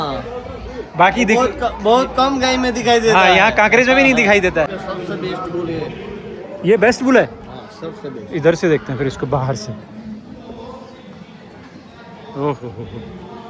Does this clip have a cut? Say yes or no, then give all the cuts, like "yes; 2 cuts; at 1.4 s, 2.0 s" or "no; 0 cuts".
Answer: yes; 1 cut; at 4.7 s